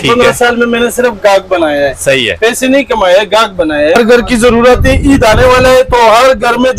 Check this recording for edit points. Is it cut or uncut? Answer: cut